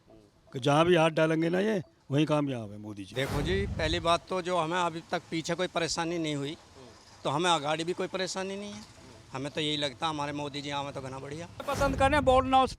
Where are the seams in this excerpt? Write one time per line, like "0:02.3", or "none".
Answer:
0:03.1
0:11.6